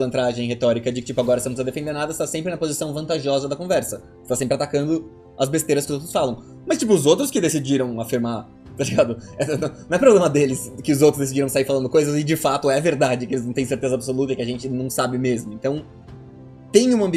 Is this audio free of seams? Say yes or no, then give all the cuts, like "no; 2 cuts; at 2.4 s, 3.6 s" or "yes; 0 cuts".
yes; 0 cuts